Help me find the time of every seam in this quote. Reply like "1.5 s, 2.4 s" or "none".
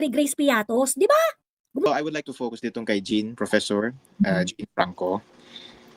1.9 s

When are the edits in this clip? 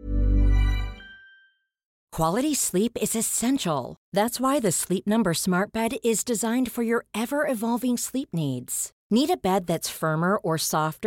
1.9 s

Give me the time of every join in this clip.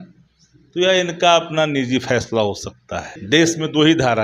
3.1 s

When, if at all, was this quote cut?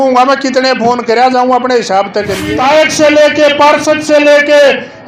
2.4 s

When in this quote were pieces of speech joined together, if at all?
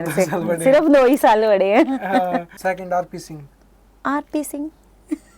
2.5 s

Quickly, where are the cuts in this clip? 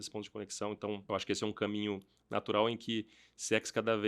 1.0 s

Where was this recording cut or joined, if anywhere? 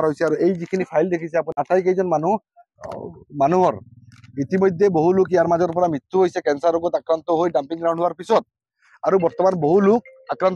1.6 s

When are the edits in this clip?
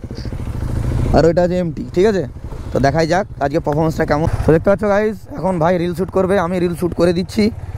4.3 s

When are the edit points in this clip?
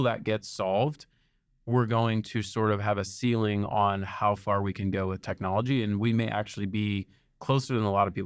none

